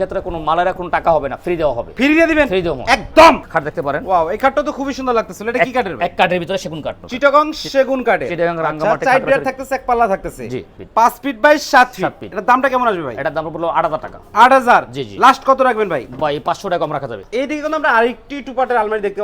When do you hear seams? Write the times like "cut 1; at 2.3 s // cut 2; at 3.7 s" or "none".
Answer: cut 1; at 3.4 s // cut 2; at 7.0 s // cut 3; at 10.7 s // cut 4; at 17.2 s